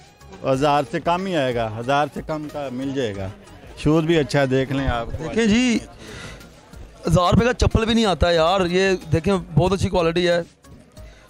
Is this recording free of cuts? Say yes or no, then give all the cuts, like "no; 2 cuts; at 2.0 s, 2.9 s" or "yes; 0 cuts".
yes; 0 cuts